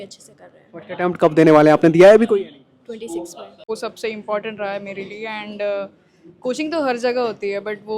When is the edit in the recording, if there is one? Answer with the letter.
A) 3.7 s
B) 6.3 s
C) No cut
A